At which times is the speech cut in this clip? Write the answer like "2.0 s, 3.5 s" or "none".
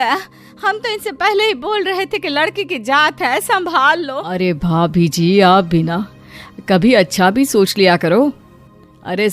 4.3 s

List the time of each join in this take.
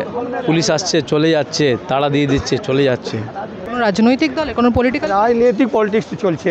3.6 s

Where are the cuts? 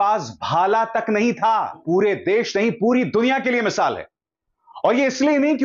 1.7 s

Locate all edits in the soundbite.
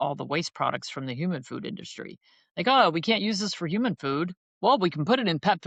none

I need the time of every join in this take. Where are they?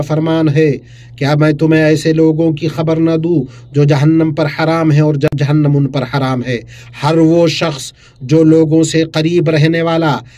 5.3 s

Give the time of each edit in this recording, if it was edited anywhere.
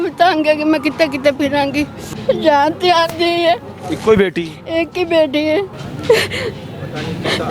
2.0 s, 5.9 s

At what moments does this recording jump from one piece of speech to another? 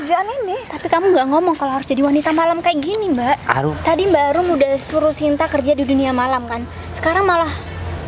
3.8 s

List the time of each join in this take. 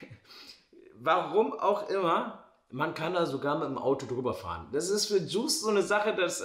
none

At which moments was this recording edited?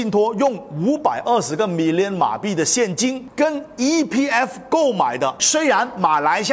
5.4 s

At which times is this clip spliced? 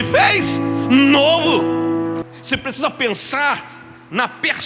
2.2 s

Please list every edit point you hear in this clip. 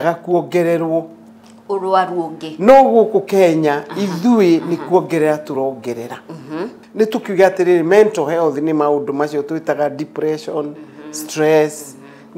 6.8 s

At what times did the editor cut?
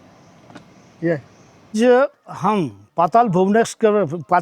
1.7 s

